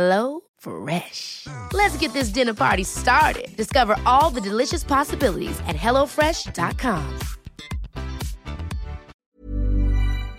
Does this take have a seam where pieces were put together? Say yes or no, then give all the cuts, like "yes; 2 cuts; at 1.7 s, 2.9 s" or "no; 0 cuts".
yes; 1 cut; at 9.1 s